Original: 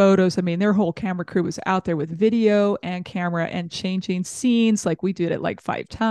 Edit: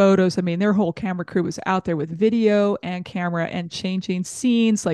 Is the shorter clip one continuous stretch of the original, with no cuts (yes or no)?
yes